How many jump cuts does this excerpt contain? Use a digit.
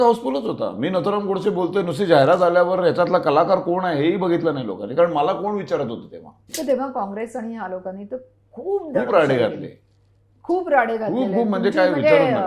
1